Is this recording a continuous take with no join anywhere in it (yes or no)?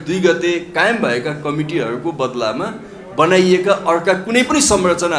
yes